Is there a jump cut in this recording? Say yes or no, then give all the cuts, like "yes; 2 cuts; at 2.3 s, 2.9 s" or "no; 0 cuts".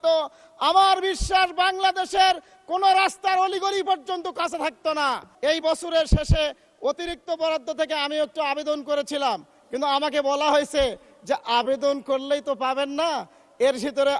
yes; 1 cut; at 5.3 s